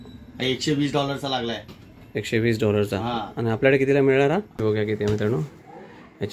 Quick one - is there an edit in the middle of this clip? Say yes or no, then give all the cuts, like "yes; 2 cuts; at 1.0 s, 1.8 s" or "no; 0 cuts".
yes; 1 cut; at 4.6 s